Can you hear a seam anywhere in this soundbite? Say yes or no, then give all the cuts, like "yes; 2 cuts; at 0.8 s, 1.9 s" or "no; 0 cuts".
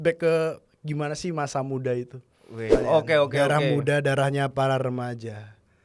yes; 1 cut; at 2.7 s